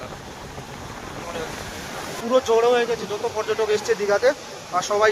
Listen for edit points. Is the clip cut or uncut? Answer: cut